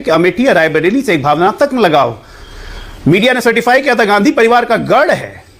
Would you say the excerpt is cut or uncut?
uncut